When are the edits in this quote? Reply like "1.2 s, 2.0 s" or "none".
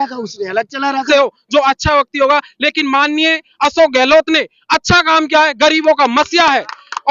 1.1 s